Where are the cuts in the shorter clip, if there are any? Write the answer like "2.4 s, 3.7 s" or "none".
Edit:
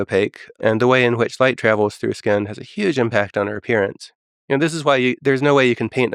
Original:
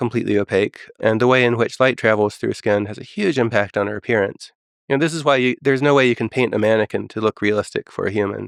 none